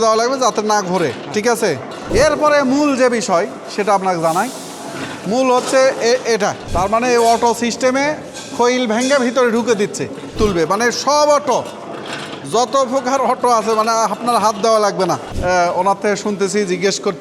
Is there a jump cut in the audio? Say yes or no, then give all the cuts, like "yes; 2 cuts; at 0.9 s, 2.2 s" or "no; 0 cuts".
yes; 4 cuts; at 2.1 s, 6.6 s, 10.3 s, 15.3 s